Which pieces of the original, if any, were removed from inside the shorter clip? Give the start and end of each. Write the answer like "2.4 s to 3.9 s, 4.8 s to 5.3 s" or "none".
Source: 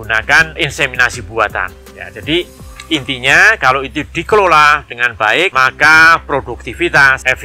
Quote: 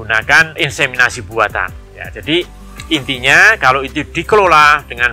none

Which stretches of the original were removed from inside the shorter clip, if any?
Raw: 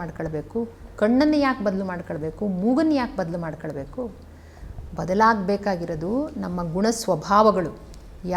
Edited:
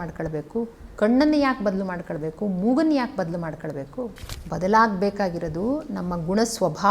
4.3 s to 4.8 s

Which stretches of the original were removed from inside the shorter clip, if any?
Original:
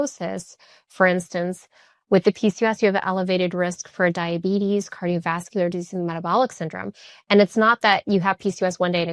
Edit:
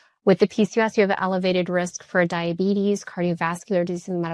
none

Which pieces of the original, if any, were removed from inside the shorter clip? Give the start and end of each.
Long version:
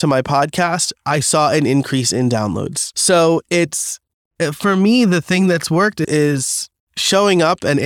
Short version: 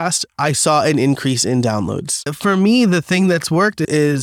2.9 s to 4.4 s

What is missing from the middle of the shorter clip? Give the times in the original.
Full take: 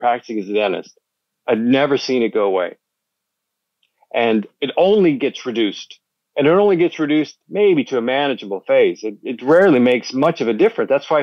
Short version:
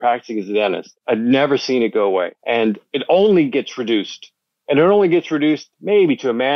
0.9 s to 1.3 s, 2.8 s to 4.0 s

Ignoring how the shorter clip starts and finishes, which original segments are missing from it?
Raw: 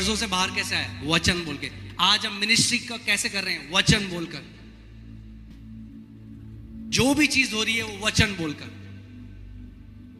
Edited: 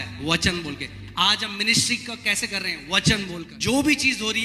4.3 s to 6.8 s

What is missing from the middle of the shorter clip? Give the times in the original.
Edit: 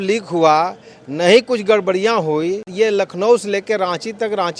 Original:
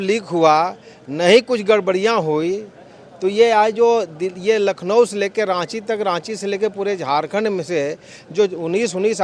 2.7 s to 4.3 s

